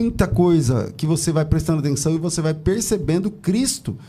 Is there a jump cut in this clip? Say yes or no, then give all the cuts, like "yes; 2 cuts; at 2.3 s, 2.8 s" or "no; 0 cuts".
no; 0 cuts